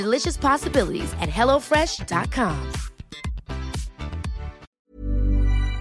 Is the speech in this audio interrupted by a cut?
yes; 1 cut; at 4.7 s

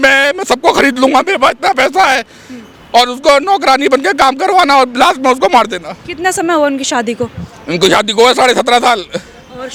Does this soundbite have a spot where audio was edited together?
no; 0 cuts

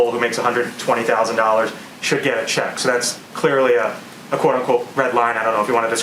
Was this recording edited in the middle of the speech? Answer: no; 0 cuts

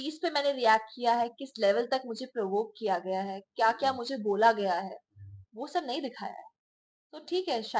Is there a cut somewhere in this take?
no; 0 cuts

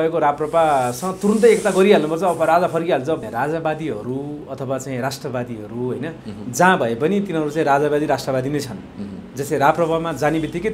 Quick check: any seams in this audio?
yes; 1 cut; at 3.3 s

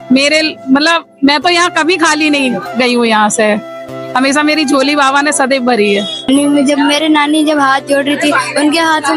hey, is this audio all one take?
no; 1 cut; at 6.2 s

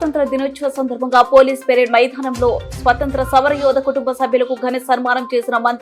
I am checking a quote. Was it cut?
no; 0 cuts

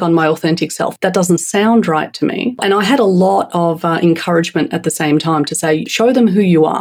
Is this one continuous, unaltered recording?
no; 3 cuts; at 0.9 s, 2.6 s, 5.9 s

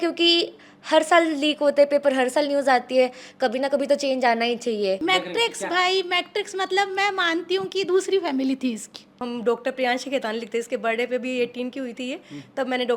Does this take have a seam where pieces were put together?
yes; 2 cuts; at 5.0 s, 9.2 s

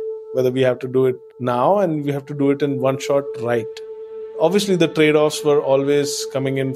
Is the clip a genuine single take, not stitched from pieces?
no; 1 cut; at 4.3 s

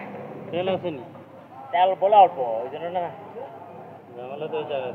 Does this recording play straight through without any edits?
yes; 0 cuts

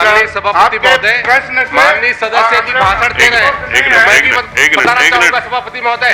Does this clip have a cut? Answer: no; 0 cuts

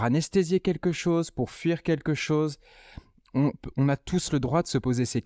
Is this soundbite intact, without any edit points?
yes; 0 cuts

